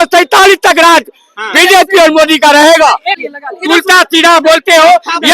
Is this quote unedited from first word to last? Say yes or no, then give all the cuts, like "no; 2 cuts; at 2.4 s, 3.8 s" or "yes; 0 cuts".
no; 1 cut; at 3.1 s